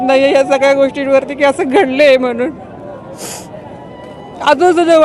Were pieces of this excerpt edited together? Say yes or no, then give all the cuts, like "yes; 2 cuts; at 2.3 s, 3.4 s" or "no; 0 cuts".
no; 0 cuts